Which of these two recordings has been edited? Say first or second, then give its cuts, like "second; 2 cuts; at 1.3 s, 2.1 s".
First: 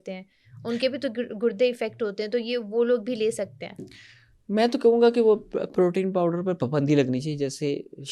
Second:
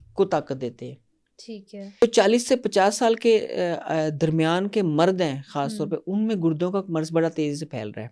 second; 1 cut; at 2.0 s